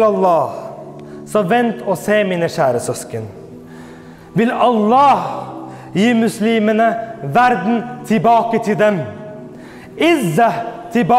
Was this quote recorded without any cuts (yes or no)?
yes